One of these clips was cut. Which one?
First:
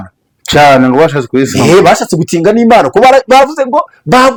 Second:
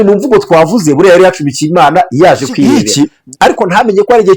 second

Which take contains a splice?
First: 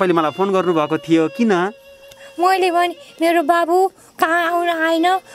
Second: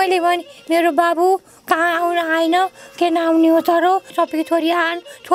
second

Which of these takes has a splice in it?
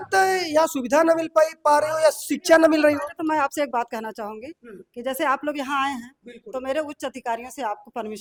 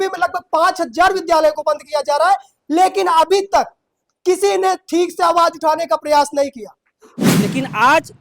second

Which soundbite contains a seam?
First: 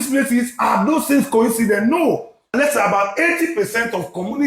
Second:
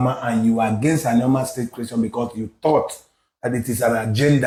first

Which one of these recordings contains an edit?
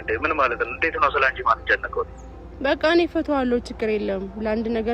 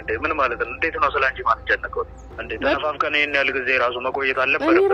second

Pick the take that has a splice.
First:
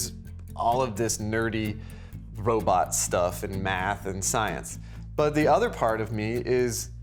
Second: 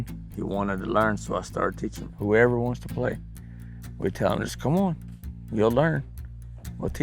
second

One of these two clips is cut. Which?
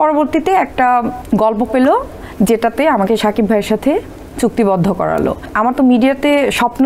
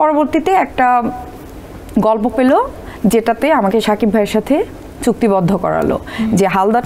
first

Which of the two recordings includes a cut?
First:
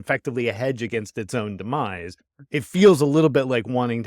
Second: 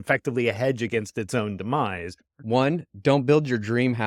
second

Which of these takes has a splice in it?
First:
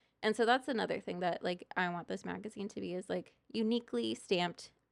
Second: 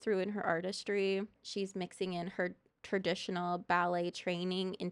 second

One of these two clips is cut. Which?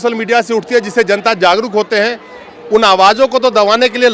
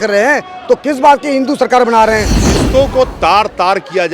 second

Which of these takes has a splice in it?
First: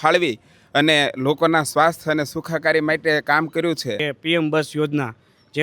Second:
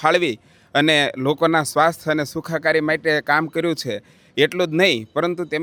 first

